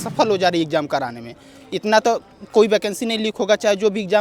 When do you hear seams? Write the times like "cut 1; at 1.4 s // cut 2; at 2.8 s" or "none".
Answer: none